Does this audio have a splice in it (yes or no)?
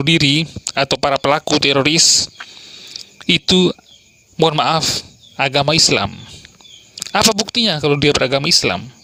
no